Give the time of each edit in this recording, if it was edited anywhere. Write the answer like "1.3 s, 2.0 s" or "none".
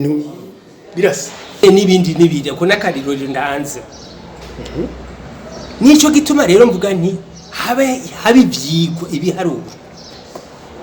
1.6 s